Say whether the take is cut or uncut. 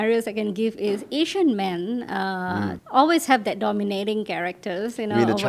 uncut